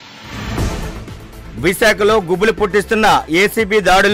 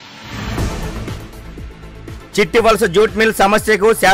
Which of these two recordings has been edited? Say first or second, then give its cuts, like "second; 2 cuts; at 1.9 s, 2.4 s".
second; 1 cut; at 0.9 s